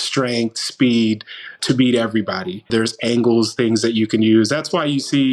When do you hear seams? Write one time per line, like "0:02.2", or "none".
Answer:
0:01.6
0:02.7